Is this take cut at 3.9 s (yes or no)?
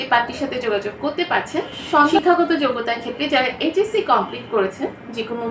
no